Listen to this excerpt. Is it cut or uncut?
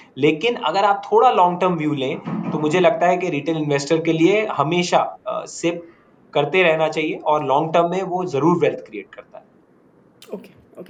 uncut